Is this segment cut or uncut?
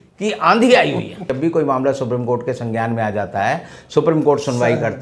cut